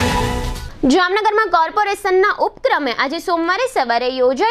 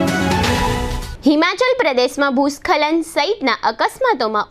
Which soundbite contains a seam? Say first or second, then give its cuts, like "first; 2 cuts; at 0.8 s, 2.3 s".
second; 1 cut; at 0.9 s